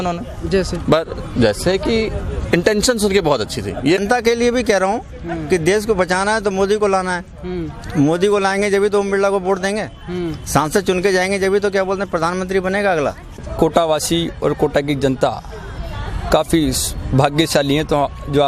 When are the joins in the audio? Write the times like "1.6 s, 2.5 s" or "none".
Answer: 4.0 s, 13.5 s